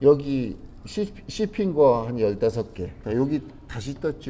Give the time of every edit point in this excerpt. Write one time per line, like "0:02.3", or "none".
0:03.0